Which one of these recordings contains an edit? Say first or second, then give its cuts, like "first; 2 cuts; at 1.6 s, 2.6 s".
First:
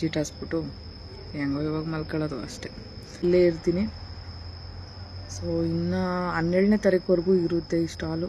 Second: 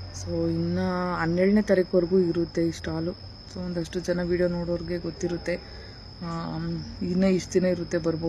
first; 1 cut; at 3.2 s